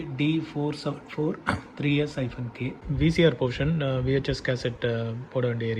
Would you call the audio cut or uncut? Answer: cut